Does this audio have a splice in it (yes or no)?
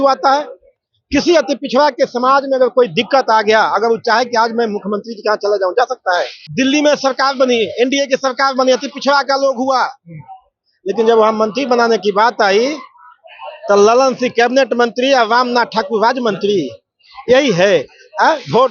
yes